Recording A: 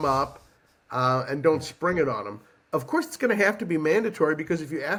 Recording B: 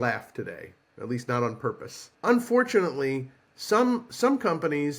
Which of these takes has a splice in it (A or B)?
B